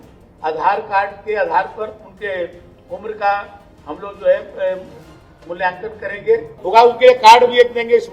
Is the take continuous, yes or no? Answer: no